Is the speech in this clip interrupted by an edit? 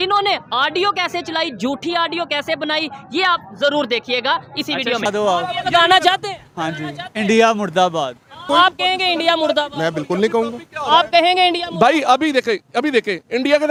no; 0 cuts

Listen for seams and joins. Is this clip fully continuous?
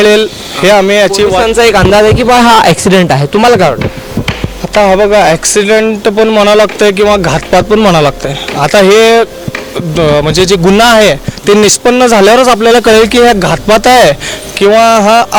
yes; 0 cuts

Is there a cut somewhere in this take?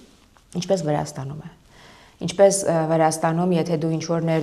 no; 0 cuts

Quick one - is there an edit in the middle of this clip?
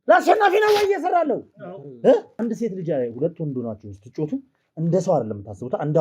yes; 1 cut; at 2.3 s

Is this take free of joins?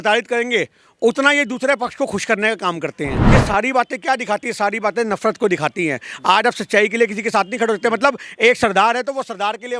no; 1 cut; at 3.2 s

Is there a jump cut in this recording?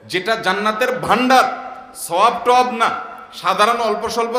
no; 0 cuts

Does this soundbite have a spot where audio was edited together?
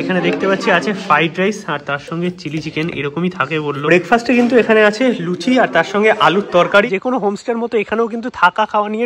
yes; 2 cuts; at 3.8 s, 6.9 s

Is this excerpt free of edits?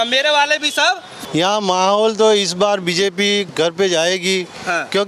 no; 1 cut; at 1.1 s

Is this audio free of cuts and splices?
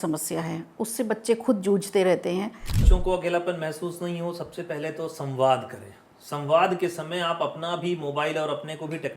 no; 1 cut; at 2.8 s

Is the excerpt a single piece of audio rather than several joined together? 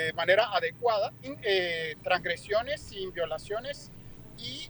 no; 1 cut; at 1.3 s

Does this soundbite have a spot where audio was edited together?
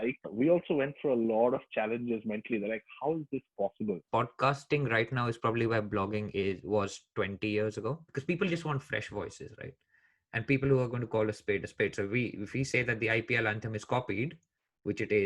yes; 2 cuts; at 4.0 s, 8.1 s

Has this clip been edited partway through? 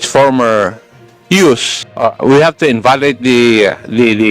yes; 1 cut; at 1.8 s

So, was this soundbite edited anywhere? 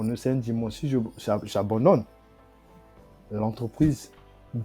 no; 0 cuts

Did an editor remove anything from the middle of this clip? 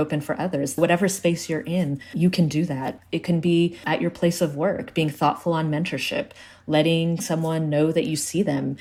no; 0 cuts

